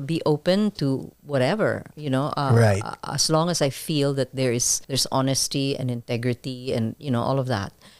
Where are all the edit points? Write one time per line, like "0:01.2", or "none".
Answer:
0:04.8